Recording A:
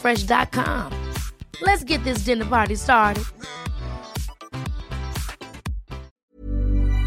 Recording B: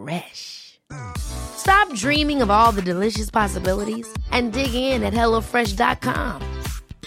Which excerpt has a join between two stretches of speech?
A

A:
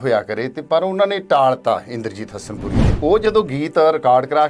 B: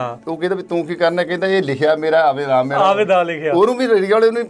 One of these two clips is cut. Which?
A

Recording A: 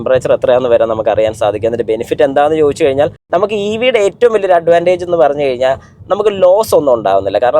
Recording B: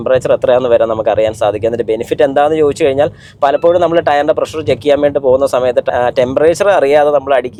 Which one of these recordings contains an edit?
A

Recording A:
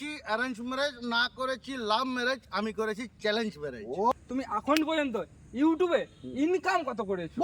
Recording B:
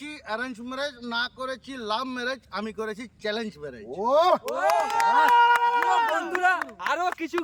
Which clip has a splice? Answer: A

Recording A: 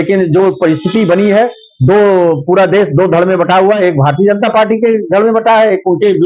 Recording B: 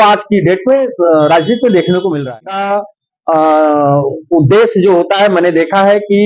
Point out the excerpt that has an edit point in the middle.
B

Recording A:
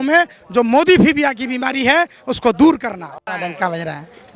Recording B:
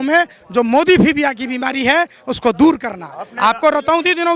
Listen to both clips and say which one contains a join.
A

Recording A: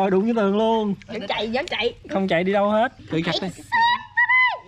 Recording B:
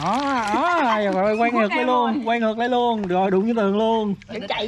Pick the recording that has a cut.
A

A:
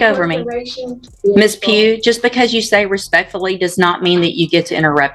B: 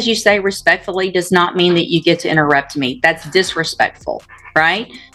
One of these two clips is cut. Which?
A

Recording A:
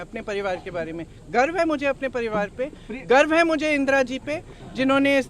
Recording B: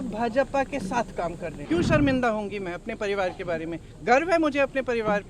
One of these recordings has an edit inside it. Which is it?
B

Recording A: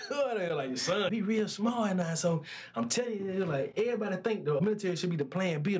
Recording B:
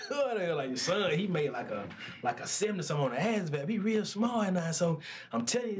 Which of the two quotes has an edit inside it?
A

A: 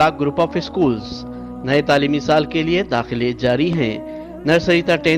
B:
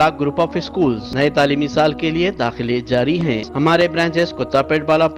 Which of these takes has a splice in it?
B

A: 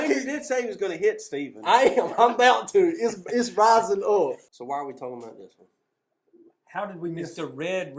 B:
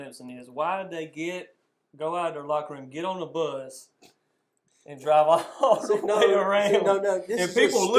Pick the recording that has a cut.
A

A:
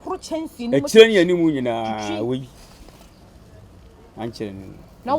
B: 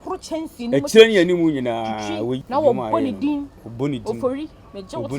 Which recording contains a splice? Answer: B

